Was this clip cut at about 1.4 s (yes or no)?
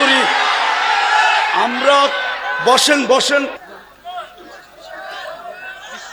no